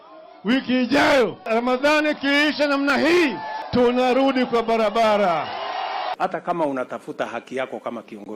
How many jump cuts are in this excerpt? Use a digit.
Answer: 1